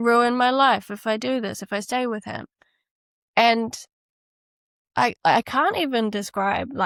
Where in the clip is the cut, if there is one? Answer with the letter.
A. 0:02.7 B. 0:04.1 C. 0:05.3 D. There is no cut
D